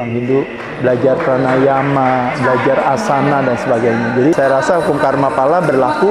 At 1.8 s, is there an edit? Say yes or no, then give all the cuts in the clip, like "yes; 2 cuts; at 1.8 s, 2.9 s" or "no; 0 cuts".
no; 1 cut; at 4.3 s